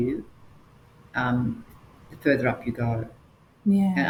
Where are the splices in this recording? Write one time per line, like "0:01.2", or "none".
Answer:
none